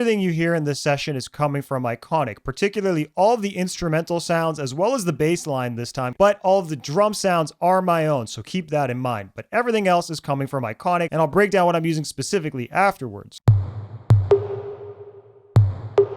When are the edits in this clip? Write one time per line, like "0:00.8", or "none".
0:06.1
0:11.3
0:13.2

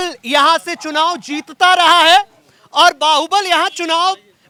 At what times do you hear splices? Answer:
none

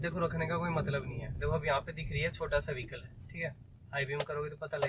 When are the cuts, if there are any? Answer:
0:01.2

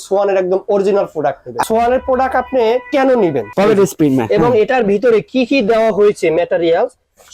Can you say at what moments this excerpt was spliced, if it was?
0:01.6
0:03.5

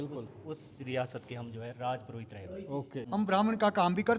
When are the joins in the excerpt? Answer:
0:03.0

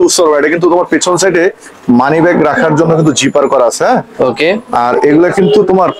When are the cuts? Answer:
none

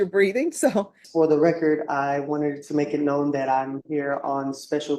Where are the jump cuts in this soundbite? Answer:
0:01.0

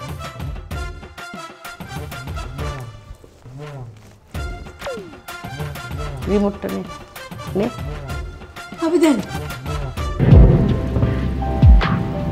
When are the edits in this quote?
0:10.0

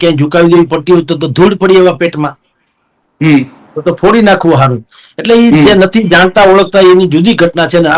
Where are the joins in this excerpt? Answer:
none

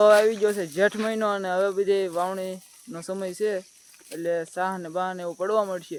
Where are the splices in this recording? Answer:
none

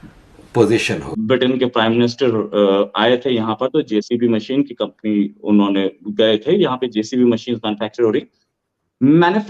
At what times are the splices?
0:01.1

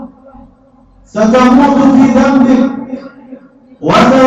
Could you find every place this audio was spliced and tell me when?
none

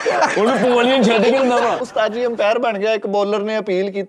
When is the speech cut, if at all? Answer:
0:01.8

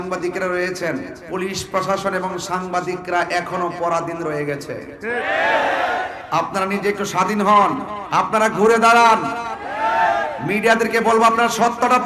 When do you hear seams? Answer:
0:01.2
0:06.2
0:07.9

